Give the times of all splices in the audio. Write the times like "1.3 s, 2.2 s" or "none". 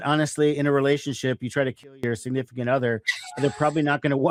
none